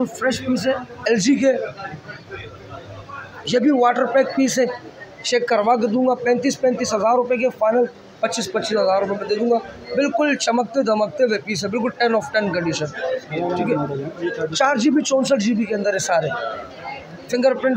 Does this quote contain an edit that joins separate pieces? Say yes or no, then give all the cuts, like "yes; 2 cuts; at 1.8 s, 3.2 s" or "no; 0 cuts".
yes; 1 cut; at 1.1 s